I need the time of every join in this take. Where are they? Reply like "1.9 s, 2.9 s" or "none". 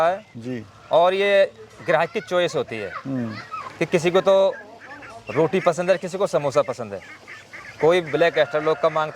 none